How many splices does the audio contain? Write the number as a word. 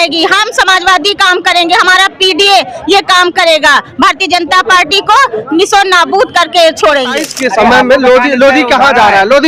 one